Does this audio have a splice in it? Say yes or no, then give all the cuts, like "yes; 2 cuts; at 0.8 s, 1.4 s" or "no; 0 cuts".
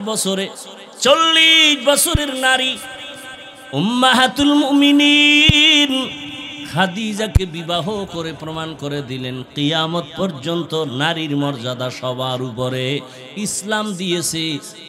no; 0 cuts